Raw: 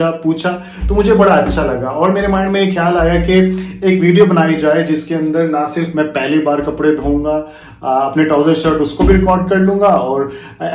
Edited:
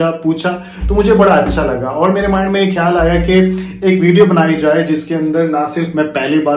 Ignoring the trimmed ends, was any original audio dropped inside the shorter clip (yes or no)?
no